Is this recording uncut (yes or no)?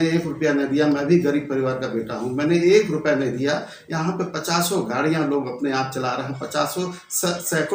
yes